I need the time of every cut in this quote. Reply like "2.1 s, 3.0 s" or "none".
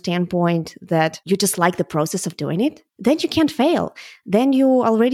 2.9 s